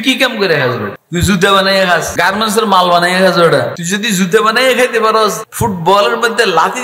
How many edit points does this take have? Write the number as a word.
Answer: four